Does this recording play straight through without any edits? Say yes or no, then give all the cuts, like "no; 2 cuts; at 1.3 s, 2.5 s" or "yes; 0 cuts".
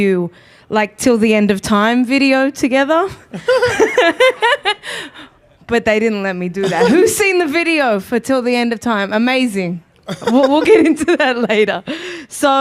no; 1 cut; at 4.8 s